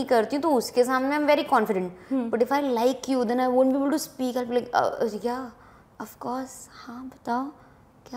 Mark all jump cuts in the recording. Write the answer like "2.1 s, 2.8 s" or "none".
none